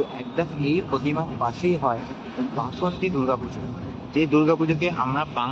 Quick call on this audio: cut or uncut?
uncut